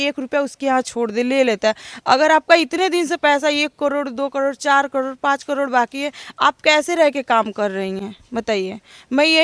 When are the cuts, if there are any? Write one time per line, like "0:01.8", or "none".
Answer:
none